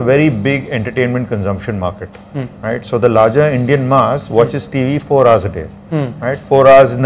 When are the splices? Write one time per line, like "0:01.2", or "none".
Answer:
none